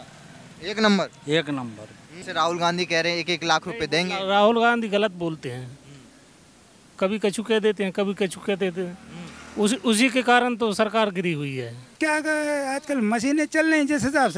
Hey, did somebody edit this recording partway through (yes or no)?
yes